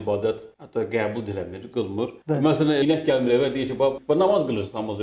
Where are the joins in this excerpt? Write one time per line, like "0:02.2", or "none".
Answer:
0:02.1
0:02.8
0:04.0